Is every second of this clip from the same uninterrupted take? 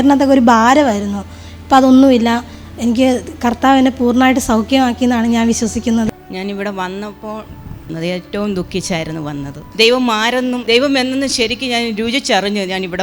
no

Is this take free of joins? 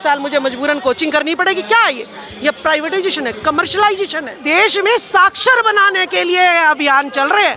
no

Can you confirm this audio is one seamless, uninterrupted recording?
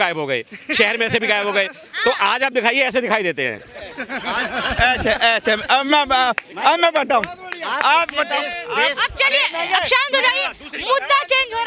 yes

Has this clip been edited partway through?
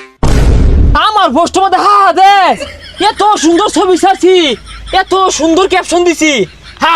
yes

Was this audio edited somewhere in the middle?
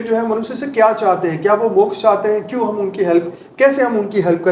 no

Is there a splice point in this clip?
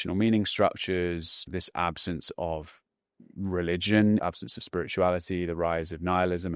yes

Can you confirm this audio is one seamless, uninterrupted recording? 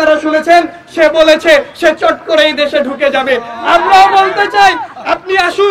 yes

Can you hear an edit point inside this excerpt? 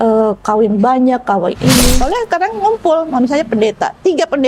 yes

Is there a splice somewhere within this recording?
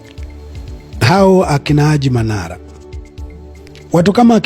yes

